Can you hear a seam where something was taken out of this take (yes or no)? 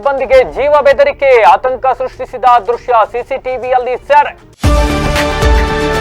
yes